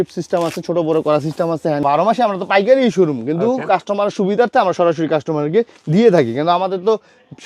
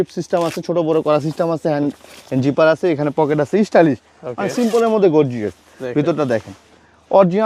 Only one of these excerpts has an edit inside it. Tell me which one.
first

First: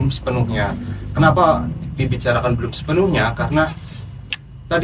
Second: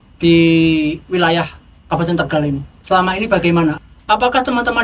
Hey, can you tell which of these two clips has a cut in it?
second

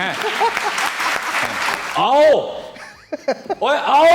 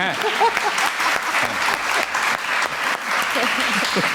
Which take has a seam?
first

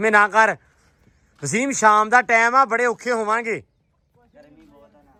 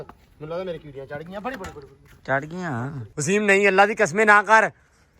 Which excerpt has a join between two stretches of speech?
second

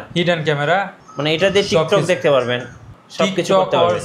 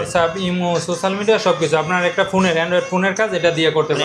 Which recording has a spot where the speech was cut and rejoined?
first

